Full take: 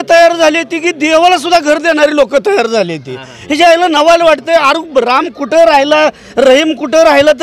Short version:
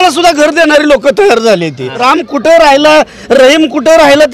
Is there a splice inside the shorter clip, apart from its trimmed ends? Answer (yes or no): yes